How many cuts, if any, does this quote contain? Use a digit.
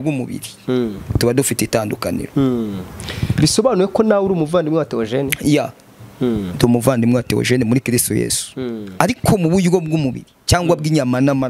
0